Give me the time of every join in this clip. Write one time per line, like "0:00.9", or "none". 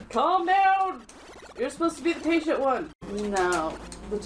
0:03.0

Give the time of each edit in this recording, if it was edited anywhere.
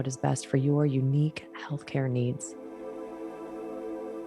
0:02.5

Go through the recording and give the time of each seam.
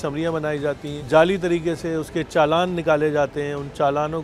0:00.9

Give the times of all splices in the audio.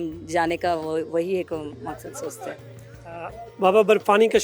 none

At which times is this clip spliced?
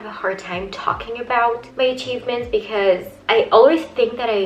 none

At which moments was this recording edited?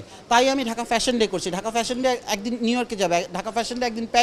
none

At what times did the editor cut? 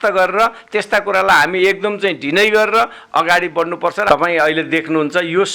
0:04.1

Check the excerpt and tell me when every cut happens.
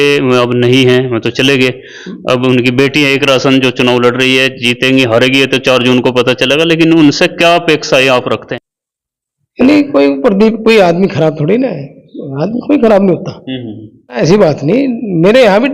0:08.5
0:14.2

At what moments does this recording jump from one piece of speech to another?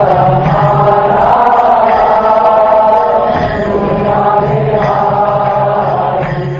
none

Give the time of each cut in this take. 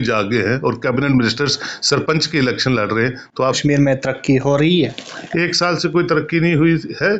0:03.6

